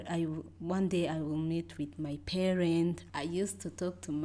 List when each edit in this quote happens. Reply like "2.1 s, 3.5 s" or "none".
3.0 s